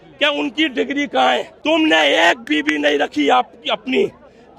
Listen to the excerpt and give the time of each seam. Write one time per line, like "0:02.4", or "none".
0:01.5